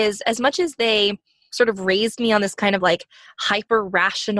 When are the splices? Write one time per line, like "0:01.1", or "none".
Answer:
none